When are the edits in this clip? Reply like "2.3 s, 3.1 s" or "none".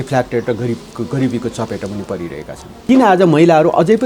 2.7 s